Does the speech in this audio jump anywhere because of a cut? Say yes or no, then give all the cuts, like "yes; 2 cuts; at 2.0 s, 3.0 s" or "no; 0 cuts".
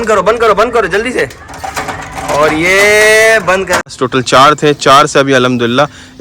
yes; 1 cut; at 3.9 s